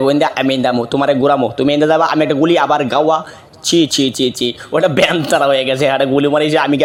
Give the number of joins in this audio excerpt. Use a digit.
0